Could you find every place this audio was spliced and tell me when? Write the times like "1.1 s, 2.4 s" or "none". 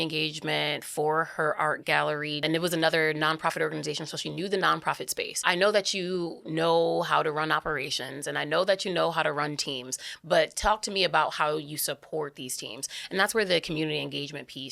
2.4 s, 5.4 s